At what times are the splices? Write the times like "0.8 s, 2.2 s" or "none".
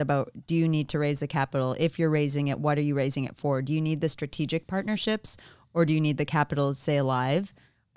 none